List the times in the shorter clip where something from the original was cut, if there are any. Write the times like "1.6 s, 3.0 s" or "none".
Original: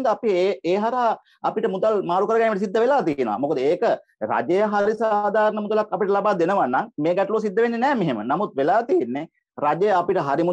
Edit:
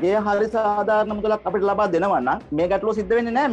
none

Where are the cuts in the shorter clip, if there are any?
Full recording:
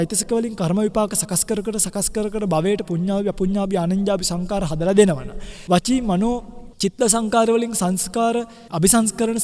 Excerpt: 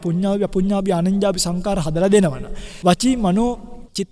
none

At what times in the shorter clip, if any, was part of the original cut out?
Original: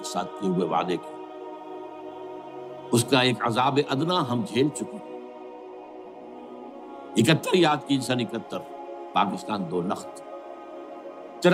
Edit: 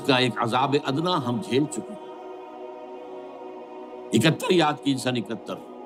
none

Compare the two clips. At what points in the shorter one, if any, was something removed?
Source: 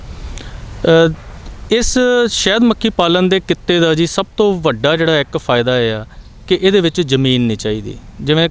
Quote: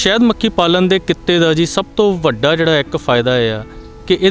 none

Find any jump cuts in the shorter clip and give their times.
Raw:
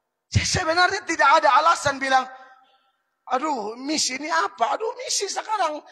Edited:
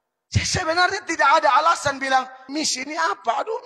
2.4 s

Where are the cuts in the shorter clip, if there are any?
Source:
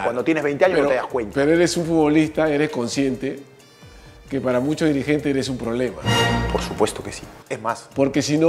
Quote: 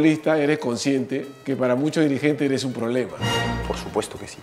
1.3 s

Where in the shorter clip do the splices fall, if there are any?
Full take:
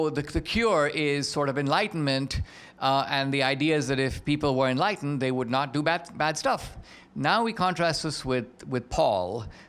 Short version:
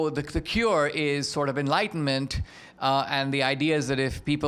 none

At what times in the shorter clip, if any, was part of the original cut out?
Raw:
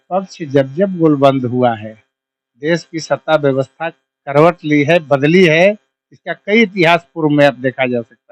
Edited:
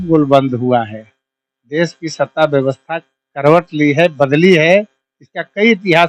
none

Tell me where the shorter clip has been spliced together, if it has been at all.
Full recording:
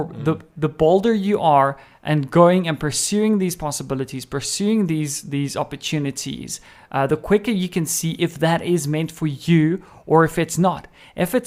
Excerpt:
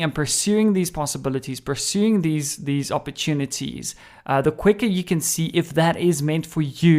none

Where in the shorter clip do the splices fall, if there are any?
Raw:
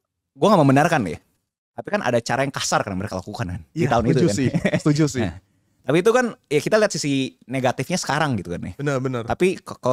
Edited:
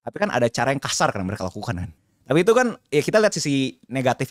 1.9 s

